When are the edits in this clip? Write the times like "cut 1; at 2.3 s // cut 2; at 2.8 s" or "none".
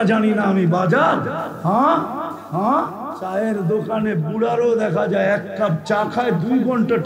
cut 1; at 1.5 s // cut 2; at 2.3 s // cut 3; at 3.1 s